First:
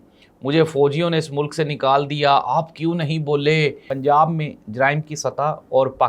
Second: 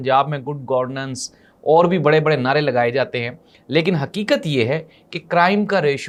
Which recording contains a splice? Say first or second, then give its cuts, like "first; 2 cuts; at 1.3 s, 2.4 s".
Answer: first; 1 cut; at 3.9 s